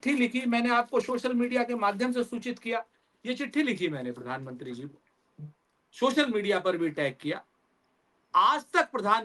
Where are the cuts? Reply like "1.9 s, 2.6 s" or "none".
none